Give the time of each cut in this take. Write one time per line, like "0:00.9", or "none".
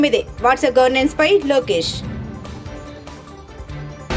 none